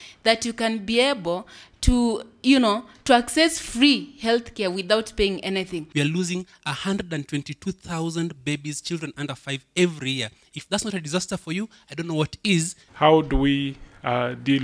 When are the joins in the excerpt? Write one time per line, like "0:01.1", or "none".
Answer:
0:05.9
0:12.8